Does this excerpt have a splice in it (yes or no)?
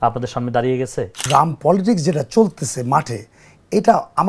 yes